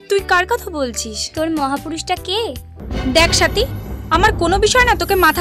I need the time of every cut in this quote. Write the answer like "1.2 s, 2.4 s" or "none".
2.7 s